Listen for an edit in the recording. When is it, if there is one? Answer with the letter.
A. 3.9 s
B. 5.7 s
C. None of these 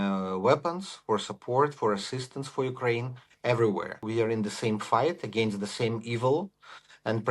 A